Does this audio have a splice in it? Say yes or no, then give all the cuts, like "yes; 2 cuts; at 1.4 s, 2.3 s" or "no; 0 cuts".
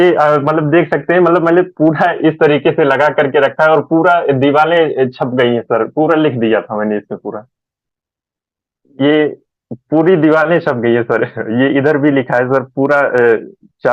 no; 0 cuts